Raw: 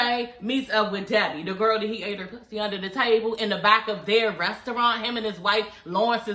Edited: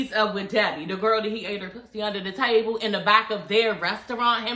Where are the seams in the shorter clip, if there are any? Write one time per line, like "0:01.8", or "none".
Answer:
none